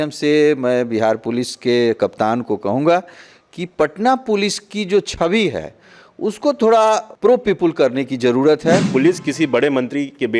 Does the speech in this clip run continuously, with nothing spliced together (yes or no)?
no